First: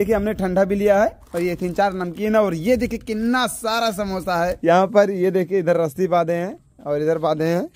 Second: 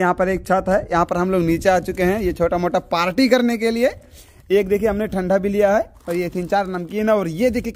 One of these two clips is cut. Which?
first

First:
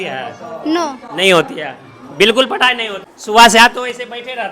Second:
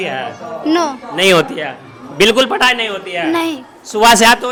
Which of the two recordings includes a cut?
first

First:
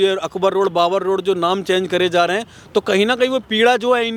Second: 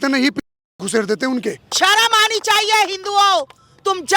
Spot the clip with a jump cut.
second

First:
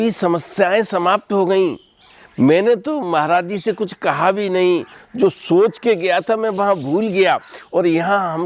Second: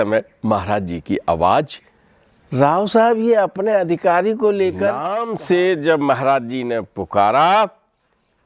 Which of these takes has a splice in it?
second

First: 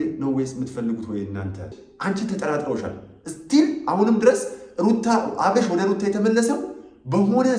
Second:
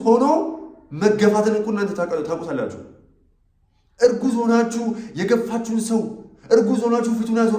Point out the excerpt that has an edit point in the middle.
first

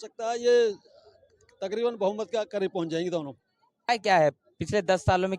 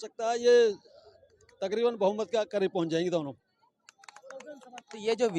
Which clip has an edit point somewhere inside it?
first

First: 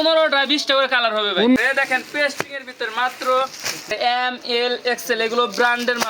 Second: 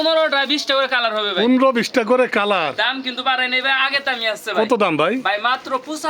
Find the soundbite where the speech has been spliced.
first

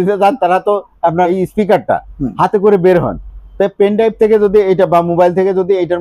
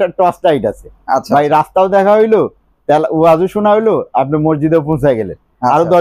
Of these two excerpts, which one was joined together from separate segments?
first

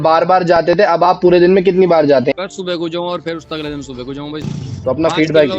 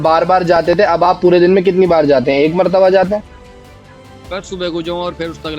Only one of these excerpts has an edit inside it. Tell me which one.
first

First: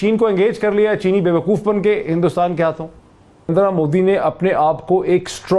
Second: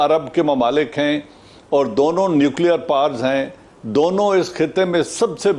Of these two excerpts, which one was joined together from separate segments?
first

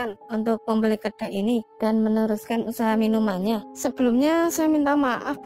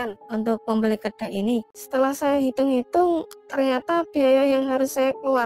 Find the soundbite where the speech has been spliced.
second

